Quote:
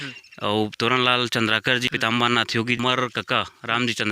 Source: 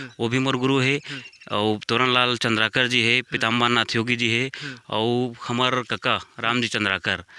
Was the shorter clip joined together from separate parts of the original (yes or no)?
yes